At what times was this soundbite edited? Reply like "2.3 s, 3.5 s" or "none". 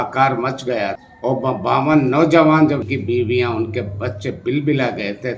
1.0 s, 2.9 s